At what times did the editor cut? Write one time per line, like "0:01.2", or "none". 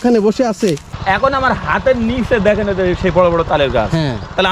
0:00.9